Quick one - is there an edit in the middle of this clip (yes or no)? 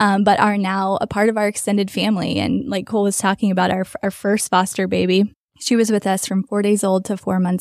yes